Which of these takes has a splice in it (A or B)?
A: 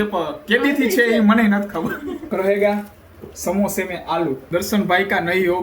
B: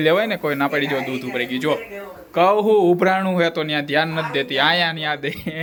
A